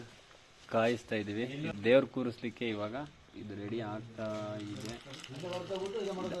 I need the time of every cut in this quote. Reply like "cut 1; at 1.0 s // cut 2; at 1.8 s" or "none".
cut 1; at 1.7 s